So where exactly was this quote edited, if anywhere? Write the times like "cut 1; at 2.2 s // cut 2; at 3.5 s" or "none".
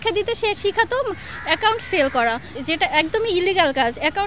cut 1; at 2.5 s